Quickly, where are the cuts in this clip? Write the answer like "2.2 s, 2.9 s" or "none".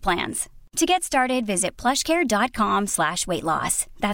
none